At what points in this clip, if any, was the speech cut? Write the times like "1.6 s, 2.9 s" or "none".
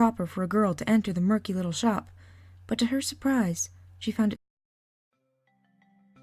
none